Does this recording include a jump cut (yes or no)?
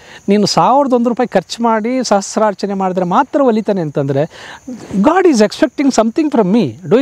no